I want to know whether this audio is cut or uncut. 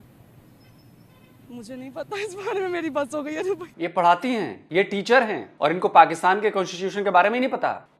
cut